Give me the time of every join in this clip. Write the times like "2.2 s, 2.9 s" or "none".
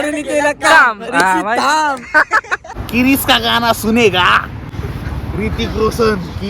2.8 s, 4.7 s